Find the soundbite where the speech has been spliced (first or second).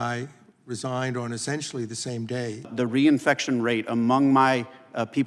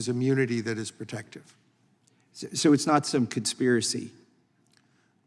first